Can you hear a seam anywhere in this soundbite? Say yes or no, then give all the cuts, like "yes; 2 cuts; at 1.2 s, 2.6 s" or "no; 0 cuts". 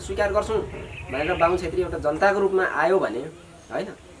no; 0 cuts